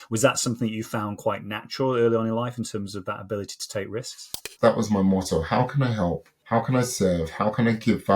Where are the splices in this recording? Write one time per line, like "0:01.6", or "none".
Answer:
0:04.5
0:06.3